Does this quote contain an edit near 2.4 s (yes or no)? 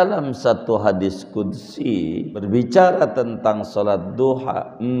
yes